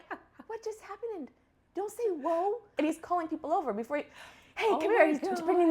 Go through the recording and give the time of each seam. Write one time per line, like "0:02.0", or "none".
0:02.7